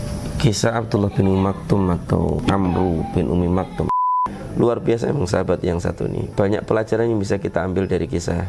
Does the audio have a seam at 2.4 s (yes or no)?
yes